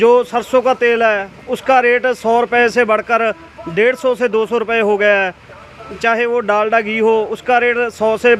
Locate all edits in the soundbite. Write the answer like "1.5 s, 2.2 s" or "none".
none

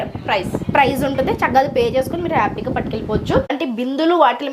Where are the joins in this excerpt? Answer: 3.5 s

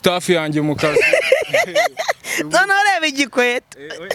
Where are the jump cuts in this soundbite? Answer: none

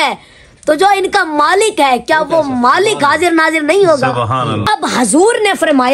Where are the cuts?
4.6 s

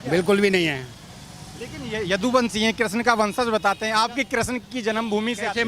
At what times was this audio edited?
none

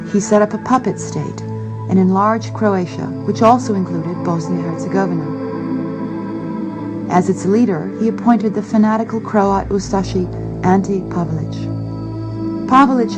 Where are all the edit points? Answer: 10.3 s

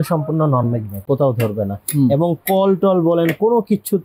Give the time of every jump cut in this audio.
1.0 s

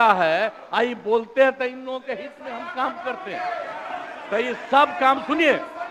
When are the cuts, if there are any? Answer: none

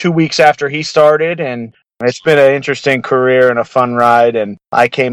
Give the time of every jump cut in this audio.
1.8 s

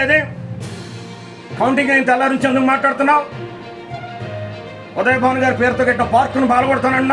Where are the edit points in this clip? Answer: none

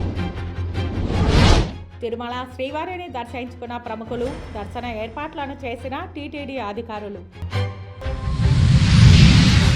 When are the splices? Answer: 1.8 s

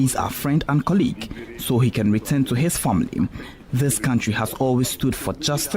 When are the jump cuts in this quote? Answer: none

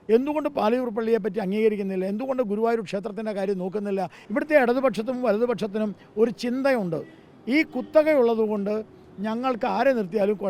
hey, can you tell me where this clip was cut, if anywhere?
4.2 s

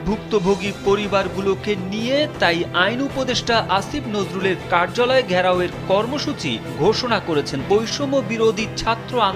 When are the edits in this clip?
7.6 s

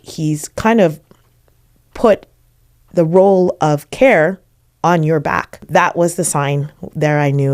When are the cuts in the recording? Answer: 5.6 s

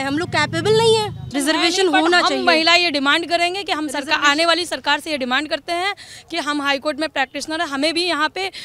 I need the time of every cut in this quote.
1.2 s

